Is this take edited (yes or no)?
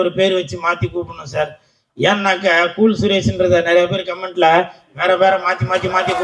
no